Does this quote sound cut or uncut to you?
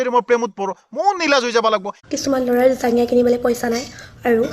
cut